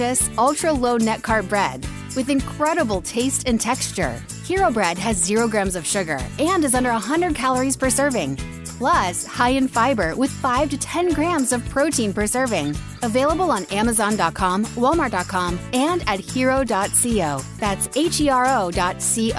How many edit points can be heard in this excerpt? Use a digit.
0